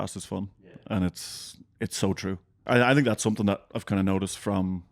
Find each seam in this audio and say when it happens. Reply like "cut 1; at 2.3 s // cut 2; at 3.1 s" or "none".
cut 1; at 2.6 s